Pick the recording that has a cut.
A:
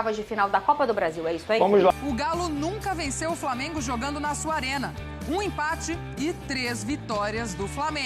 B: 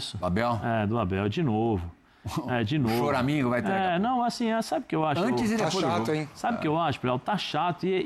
A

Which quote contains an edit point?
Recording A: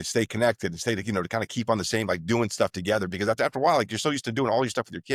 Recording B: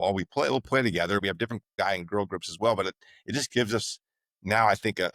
B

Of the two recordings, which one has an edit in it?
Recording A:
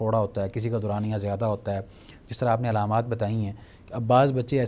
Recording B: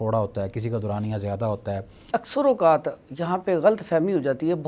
B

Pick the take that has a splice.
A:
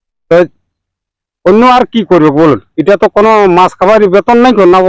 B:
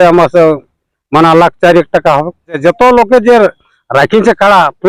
B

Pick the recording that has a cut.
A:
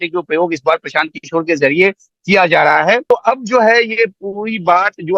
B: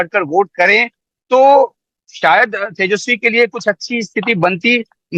A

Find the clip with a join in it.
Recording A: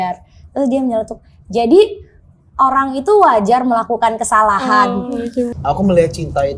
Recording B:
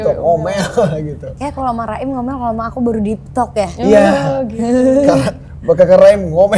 A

